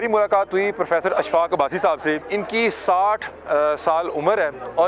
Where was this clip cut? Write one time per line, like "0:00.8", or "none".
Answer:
0:02.2